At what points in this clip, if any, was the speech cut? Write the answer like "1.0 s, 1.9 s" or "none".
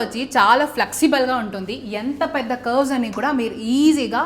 none